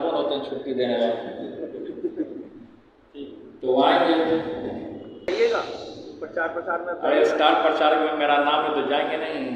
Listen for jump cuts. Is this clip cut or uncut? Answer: cut